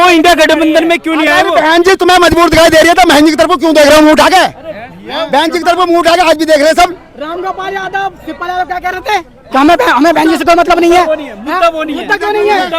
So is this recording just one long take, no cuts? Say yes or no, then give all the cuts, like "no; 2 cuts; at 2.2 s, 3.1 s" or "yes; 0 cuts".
yes; 0 cuts